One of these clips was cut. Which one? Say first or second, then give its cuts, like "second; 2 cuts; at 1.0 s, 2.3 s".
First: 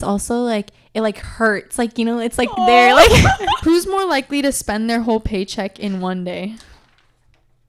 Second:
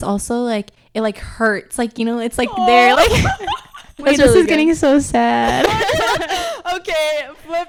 first; 1 cut; at 3.5 s